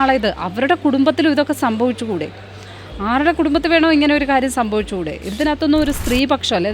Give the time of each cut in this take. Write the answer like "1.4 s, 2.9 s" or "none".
5.2 s